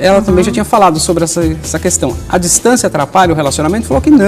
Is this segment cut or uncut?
cut